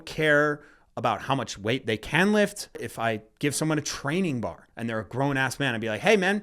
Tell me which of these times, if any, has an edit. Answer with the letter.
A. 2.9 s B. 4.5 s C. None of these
A